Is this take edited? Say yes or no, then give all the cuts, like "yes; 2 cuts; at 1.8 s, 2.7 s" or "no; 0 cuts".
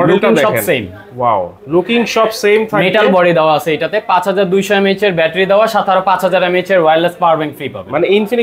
no; 0 cuts